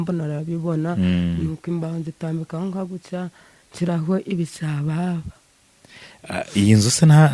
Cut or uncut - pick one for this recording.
uncut